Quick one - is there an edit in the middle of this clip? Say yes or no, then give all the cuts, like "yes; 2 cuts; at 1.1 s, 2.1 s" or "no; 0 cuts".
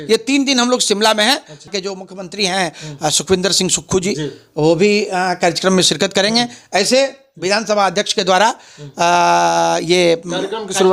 yes; 1 cut; at 1.7 s